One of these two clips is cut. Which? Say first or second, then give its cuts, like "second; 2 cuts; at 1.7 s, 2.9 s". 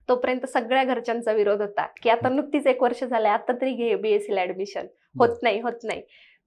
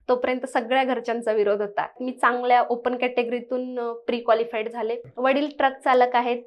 second; 2 cuts; at 2.0 s, 5.0 s